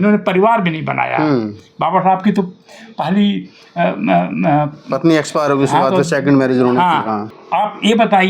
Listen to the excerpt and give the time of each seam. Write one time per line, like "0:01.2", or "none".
0:07.3